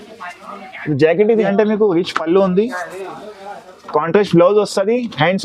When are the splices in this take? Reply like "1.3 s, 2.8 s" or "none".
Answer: 1.5 s